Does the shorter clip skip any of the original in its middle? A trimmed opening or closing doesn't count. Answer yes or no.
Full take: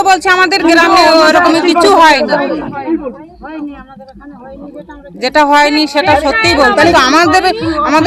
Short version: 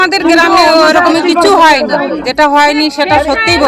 yes